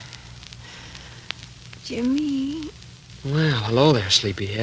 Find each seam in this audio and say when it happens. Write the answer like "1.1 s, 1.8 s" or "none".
none